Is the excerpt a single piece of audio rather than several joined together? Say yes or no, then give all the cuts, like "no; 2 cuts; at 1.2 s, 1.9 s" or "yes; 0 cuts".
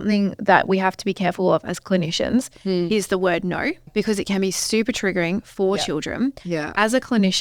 no; 1 cut; at 3.8 s